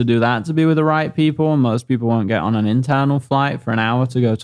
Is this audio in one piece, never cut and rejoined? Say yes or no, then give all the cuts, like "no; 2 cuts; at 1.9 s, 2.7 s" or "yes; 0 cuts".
yes; 0 cuts